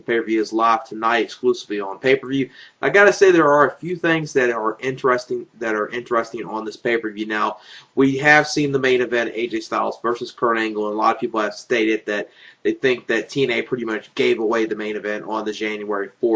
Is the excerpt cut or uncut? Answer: uncut